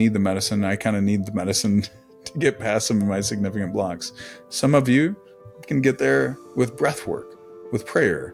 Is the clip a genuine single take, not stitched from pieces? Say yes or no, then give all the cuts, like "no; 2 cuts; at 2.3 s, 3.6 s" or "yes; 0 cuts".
yes; 0 cuts